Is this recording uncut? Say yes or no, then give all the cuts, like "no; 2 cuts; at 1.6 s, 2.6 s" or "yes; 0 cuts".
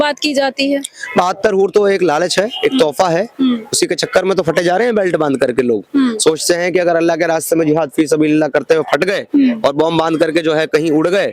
yes; 0 cuts